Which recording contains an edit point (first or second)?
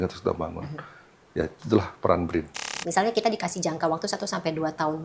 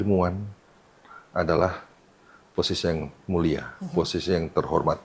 first